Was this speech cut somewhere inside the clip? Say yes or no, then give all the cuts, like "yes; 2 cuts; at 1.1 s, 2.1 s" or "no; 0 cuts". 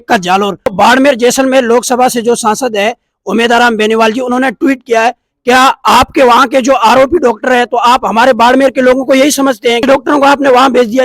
yes; 1 cut; at 9.8 s